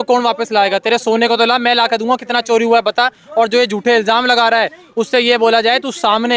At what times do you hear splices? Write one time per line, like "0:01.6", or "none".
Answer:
none